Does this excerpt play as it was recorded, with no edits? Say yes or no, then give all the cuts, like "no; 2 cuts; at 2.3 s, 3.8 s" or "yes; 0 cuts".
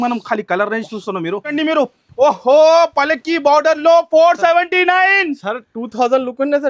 no; 1 cut; at 1.5 s